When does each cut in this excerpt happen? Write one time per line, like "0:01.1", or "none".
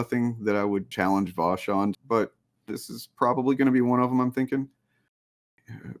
0:00.9
0:02.0
0:05.2